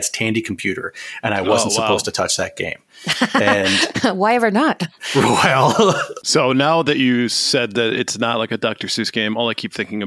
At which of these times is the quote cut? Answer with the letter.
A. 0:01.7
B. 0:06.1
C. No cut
B